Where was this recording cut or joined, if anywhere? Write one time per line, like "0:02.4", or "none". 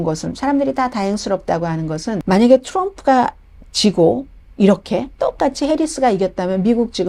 0:02.2